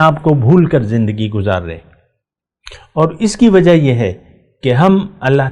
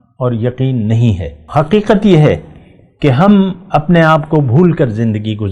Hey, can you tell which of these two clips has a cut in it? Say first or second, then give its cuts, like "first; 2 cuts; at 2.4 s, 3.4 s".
second; 1 cut; at 1.3 s